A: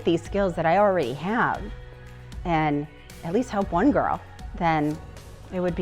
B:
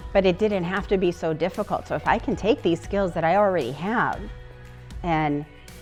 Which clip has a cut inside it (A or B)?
A